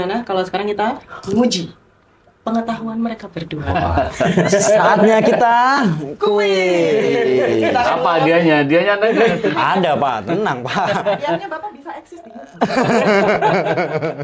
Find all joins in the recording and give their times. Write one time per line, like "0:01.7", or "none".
none